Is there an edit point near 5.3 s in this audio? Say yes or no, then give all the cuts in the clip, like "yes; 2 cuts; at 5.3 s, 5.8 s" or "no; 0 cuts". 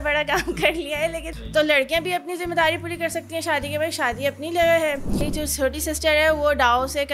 yes; 2 cuts; at 1.3 s, 5.3 s